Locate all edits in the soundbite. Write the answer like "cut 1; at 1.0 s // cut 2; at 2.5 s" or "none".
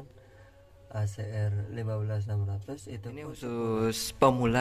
cut 1; at 3.4 s